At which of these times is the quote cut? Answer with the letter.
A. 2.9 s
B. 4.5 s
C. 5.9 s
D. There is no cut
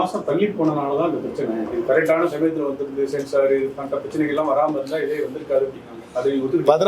D